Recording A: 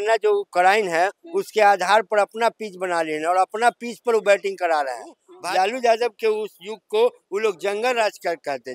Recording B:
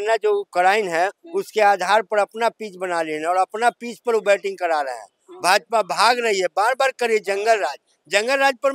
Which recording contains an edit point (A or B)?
A